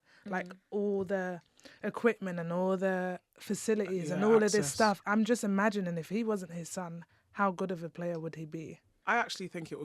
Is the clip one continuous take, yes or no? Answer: no